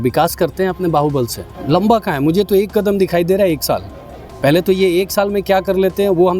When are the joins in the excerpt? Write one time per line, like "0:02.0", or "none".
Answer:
0:01.4